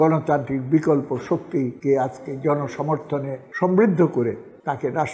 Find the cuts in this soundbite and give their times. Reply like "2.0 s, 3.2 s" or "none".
none